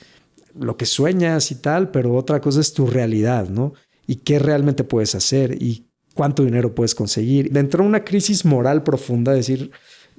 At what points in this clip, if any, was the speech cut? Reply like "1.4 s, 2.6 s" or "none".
7.5 s